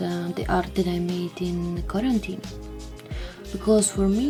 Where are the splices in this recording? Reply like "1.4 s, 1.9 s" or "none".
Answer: none